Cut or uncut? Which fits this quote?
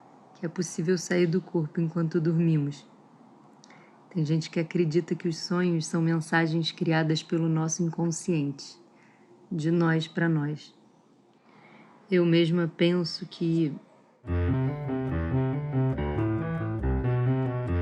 cut